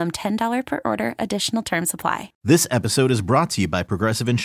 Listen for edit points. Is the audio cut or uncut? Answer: cut